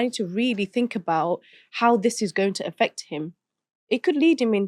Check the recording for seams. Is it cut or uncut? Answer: uncut